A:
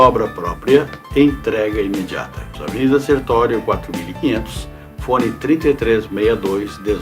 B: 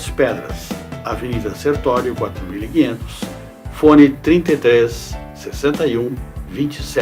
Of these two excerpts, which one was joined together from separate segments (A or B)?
A